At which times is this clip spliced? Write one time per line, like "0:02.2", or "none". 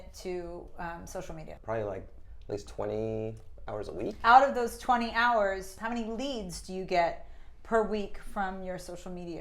0:01.6
0:04.2
0:05.7